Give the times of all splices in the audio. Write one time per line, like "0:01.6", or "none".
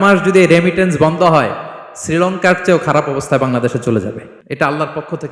0:04.3